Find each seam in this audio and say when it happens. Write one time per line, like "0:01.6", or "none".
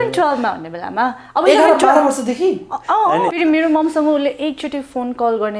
0:03.3